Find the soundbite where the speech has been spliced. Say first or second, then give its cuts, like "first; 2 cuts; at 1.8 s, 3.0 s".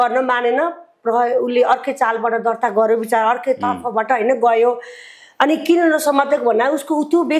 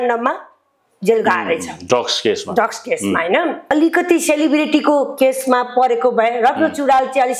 second; 1 cut; at 3.7 s